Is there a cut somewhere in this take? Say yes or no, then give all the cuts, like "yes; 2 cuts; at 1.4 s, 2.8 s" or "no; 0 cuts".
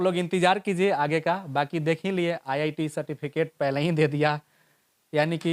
no; 0 cuts